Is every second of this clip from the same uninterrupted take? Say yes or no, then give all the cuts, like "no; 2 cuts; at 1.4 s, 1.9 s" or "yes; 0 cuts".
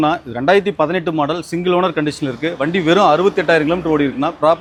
yes; 0 cuts